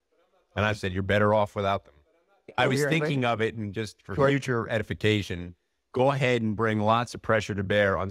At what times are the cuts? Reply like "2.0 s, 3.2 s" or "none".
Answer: 2.5 s

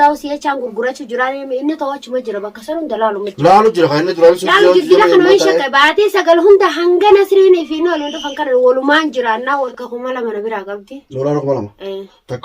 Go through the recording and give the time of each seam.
9.4 s

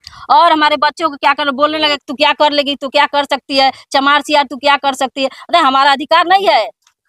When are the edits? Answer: none

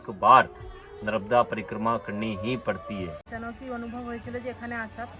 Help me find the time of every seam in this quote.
3.3 s

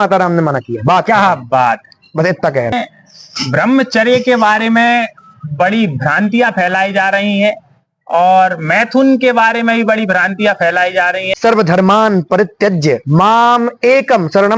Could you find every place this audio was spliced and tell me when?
2.8 s, 11.4 s

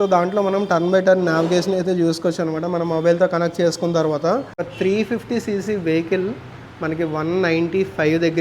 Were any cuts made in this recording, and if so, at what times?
4.6 s

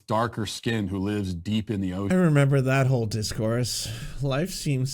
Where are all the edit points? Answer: 2.1 s

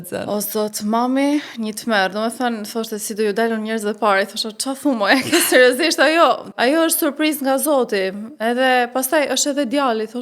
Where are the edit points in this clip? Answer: 6.5 s

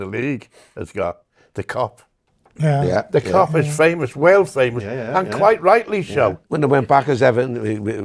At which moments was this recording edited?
6.5 s

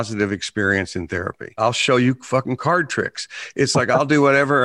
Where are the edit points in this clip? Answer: 1.7 s

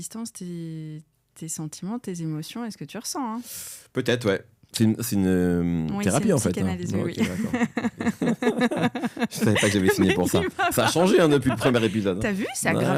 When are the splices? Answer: none

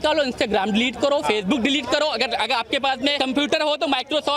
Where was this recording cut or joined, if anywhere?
3.2 s

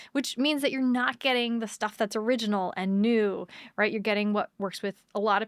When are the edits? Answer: 4.5 s

